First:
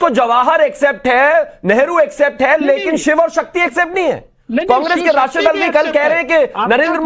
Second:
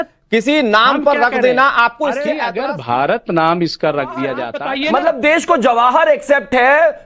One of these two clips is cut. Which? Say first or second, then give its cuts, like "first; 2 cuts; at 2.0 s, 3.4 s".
second; 2 cuts; at 2.5 s, 4.5 s